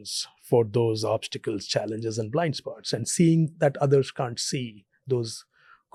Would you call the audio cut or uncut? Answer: uncut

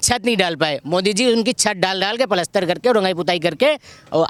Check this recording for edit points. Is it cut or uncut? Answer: uncut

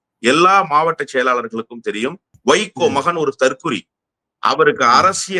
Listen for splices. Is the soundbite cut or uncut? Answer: cut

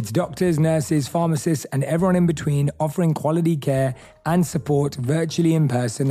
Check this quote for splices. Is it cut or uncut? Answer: uncut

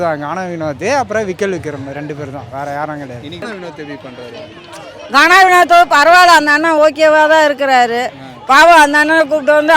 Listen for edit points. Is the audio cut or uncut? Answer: uncut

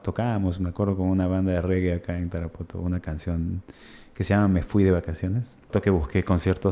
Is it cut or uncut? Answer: cut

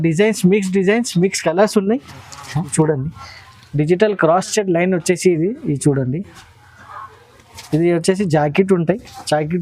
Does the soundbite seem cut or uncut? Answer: cut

